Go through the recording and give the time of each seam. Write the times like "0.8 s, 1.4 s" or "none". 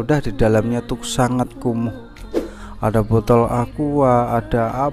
none